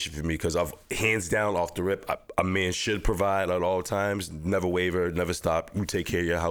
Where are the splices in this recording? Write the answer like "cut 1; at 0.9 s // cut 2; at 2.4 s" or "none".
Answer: none